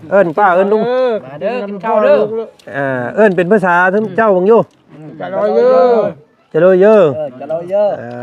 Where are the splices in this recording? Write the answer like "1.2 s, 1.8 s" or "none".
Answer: none